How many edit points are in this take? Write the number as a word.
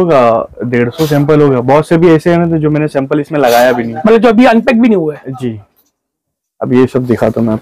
zero